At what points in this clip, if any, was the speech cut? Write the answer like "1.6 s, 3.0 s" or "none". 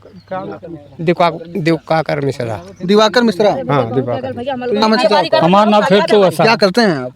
4.8 s